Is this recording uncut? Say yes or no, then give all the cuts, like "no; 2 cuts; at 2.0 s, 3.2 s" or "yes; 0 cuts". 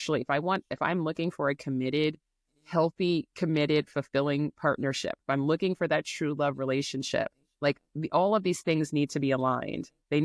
yes; 0 cuts